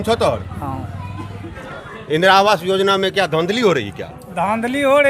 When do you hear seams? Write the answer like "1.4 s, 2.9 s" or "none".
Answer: 1.5 s

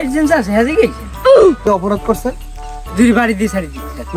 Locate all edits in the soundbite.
1.7 s

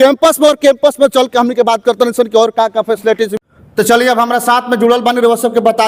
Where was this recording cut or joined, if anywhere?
none

